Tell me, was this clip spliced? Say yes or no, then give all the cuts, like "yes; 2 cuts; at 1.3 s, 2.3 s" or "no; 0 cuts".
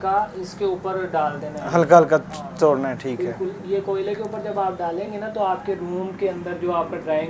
no; 0 cuts